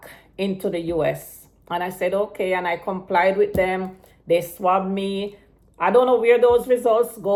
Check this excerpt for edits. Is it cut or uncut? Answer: uncut